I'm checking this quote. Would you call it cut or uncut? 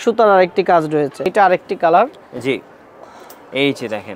cut